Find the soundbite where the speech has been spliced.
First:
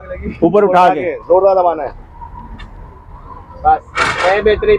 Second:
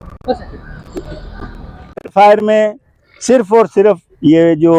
second; 1 cut; at 1.9 s

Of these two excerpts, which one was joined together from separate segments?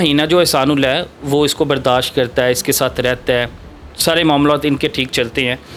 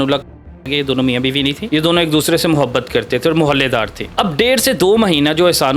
second; 2 cuts; at 1.6 s, 4.0 s

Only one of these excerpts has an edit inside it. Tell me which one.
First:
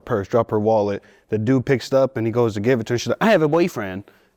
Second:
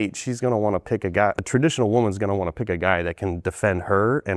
second; 1 cut; at 1.4 s

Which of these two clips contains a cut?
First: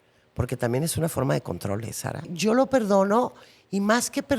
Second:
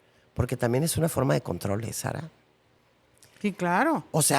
first; 1 cut; at 2.3 s

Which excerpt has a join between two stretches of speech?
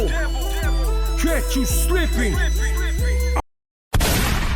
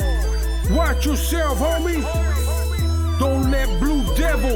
first; 1 cut; at 3.4 s

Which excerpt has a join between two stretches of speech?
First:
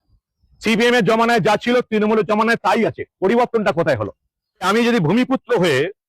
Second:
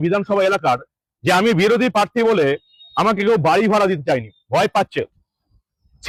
first; 1 cut; at 4.7 s

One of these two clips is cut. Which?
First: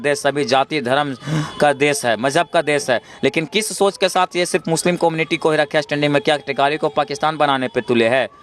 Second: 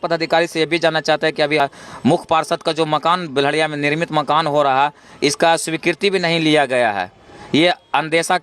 second; 1 cut; at 1.6 s

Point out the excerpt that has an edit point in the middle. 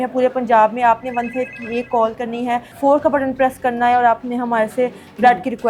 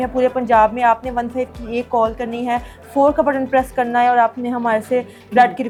first; 1 cut; at 2.7 s

